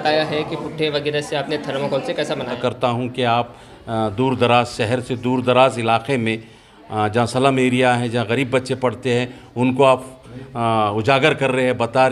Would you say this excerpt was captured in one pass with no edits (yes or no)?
no